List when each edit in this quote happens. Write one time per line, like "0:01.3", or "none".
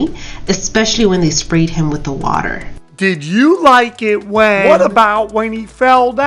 0:04.6